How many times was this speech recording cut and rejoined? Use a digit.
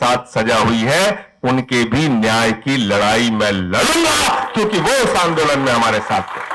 0